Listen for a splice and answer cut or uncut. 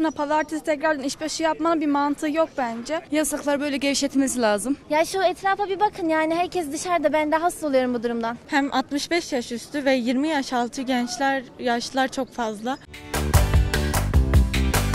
cut